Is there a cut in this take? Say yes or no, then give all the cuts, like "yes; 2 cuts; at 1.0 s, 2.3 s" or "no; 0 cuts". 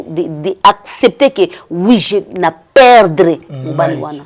no; 0 cuts